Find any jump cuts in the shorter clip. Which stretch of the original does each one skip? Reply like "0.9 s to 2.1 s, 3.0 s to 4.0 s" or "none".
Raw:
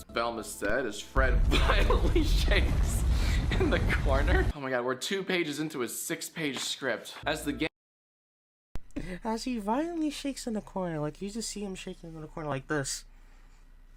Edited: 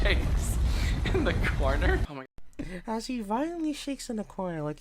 4.6 s to 8.5 s